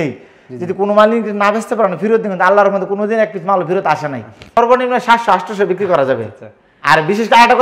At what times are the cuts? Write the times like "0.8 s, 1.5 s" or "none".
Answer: 4.6 s